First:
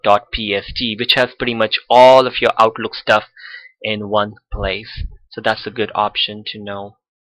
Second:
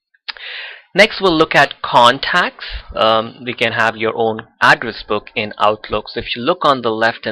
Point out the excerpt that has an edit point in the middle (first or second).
first